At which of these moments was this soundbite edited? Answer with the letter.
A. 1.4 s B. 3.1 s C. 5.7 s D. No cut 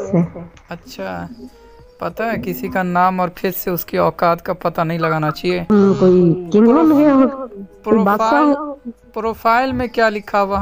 C